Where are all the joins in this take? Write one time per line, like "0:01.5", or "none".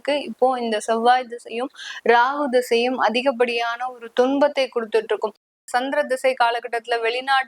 0:05.5